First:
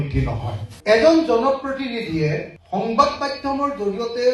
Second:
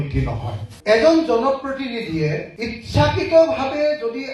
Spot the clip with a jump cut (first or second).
first